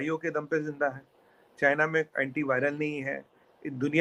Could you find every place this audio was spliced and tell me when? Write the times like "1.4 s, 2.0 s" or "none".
none